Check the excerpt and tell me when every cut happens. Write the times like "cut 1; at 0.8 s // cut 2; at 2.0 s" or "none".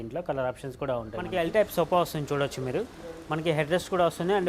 cut 1; at 1.3 s